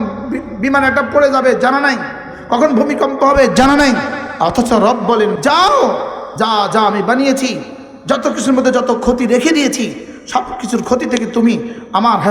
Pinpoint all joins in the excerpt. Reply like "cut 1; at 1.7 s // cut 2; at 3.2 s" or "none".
cut 1; at 4.2 s // cut 2; at 5.4 s // cut 3; at 6.2 s